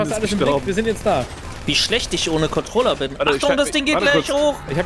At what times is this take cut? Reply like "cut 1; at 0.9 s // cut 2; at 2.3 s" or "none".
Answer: cut 1; at 1.4 s